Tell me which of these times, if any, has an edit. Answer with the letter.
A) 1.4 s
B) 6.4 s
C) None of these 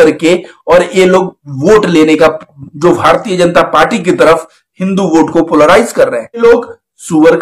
B